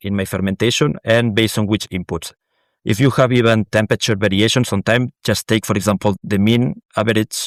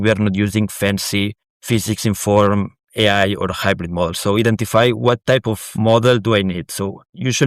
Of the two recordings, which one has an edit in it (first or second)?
second